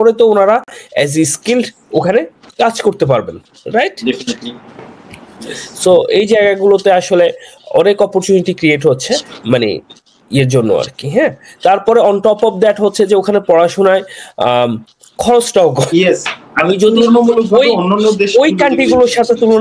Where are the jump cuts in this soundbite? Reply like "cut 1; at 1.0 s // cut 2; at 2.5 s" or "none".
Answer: cut 1; at 15.9 s